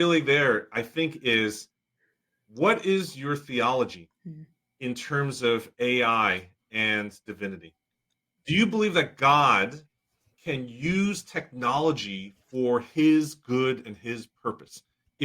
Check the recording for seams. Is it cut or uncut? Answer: cut